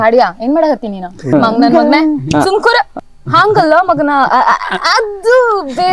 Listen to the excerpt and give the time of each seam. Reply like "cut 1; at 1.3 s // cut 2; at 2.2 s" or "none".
cut 1; at 1.3 s // cut 2; at 2.9 s